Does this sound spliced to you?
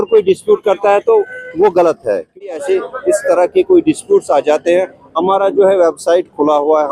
yes; 1 cut; at 2.4 s

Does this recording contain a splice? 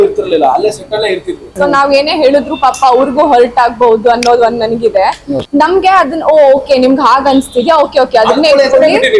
yes; 2 cuts; at 1.5 s, 5.3 s

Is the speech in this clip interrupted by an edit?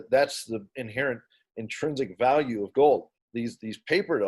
yes; 1 cut; at 3.2 s

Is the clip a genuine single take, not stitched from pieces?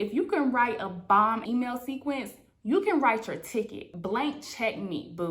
no; 2 cuts; at 1.4 s, 3.9 s

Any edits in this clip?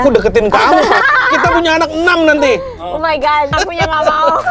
yes; 2 cuts; at 1.0 s, 3.5 s

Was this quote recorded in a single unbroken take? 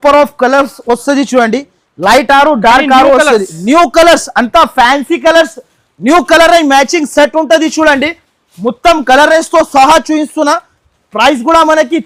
yes; 0 cuts

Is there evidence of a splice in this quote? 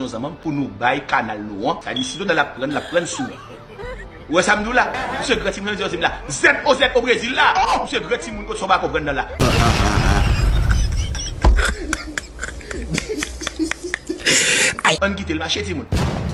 no; 0 cuts

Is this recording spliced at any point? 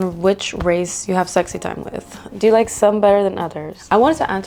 no; 0 cuts

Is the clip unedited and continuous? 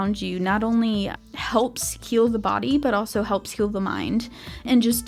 yes; 0 cuts

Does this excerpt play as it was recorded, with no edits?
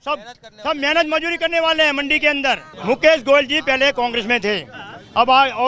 no; 1 cut; at 2.7 s

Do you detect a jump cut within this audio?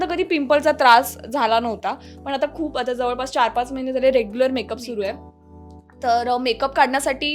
no; 0 cuts

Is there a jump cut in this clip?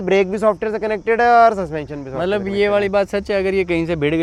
no; 0 cuts

